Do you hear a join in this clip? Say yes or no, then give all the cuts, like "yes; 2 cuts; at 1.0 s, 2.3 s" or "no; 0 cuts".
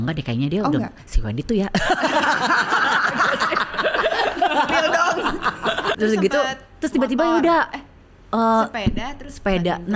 no; 0 cuts